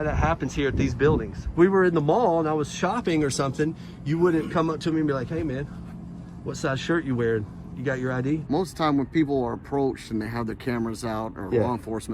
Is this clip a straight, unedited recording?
no; 2 cuts; at 1.4 s, 8.4 s

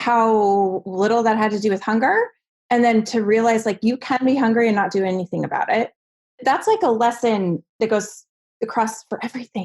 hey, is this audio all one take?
no; 1 cut; at 6.4 s

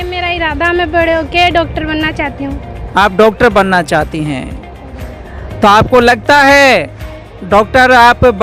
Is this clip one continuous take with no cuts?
yes; 0 cuts

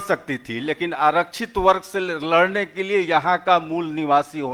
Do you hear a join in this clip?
no; 0 cuts

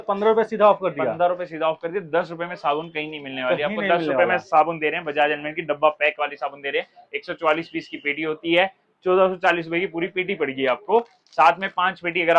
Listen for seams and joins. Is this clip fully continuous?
yes; 0 cuts

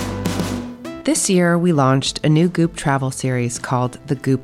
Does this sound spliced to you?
yes; 1 cut; at 1.0 s

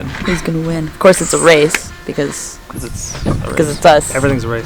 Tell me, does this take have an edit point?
no; 0 cuts

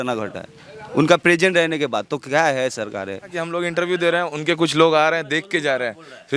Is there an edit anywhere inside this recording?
yes; 1 cut; at 3.4 s

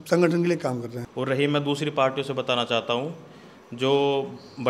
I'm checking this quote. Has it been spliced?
yes; 1 cut; at 1.0 s

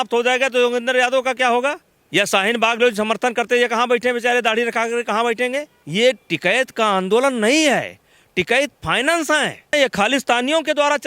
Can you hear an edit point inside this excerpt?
yes; 3 cuts; at 1.9 s, 5.8 s, 9.7 s

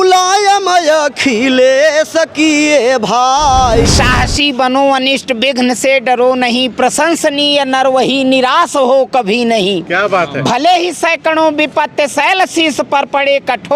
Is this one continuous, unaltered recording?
no; 1 cut; at 3.9 s

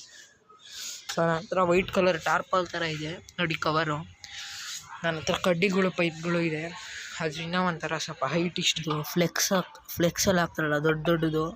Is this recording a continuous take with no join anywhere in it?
no; 2 cuts; at 1.0 s, 8.7 s

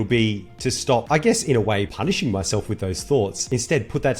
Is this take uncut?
no; 3 cuts; at 1.1 s, 1.9 s, 3.4 s

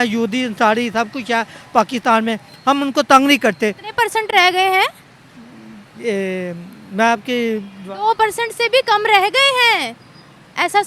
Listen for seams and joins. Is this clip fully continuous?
yes; 0 cuts

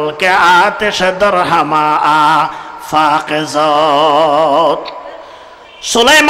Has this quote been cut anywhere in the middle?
no; 0 cuts

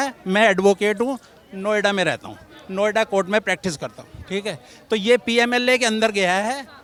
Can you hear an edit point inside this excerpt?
no; 0 cuts

